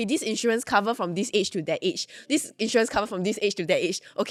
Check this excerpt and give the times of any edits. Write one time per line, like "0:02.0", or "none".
none